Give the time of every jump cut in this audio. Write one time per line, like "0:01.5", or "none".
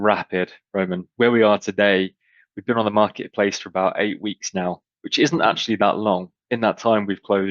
0:01.0
0:06.4